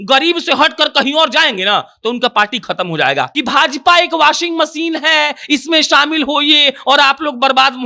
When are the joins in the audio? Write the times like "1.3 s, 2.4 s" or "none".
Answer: 3.3 s